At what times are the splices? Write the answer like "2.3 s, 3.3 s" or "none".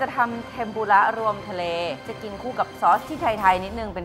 2.0 s